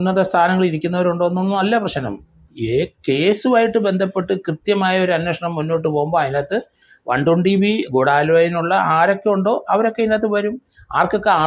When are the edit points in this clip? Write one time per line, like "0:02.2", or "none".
none